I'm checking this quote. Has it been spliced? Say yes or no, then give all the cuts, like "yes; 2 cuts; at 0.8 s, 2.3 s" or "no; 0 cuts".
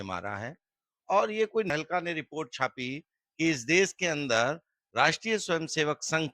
yes; 1 cut; at 1.7 s